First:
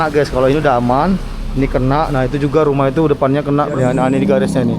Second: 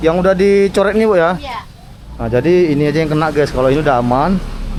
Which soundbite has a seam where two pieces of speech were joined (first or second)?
first